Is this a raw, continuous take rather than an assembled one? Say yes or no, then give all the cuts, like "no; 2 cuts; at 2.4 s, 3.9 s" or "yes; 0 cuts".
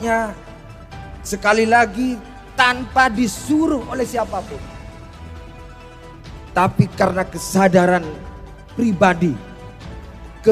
no; 2 cuts; at 4.6 s, 6.5 s